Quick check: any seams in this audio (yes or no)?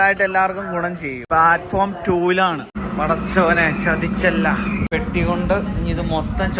no